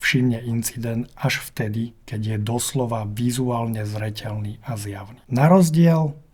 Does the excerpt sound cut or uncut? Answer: uncut